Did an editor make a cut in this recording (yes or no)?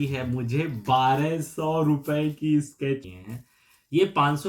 yes